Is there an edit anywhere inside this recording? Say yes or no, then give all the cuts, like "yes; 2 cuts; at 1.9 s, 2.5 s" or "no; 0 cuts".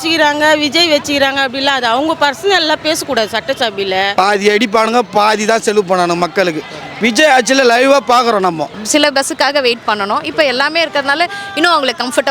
yes; 2 cuts; at 4.1 s, 8.8 s